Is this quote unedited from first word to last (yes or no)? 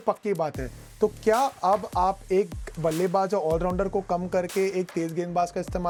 yes